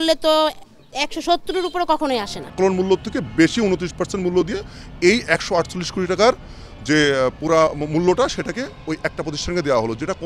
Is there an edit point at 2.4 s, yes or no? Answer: yes